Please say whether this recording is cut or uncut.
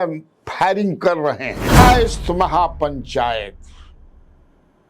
cut